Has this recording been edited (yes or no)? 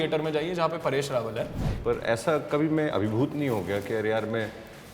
yes